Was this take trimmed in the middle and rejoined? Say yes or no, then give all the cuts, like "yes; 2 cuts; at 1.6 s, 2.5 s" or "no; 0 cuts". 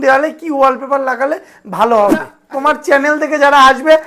yes; 1 cut; at 2.4 s